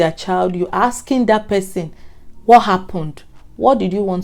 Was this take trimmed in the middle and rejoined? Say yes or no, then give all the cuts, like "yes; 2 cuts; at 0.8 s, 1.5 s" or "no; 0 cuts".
no; 0 cuts